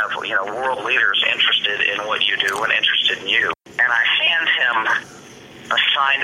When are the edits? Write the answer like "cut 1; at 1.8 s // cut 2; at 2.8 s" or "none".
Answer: cut 1; at 3.5 s